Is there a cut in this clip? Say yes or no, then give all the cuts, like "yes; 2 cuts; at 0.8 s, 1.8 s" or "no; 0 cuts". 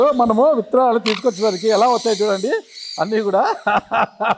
no; 0 cuts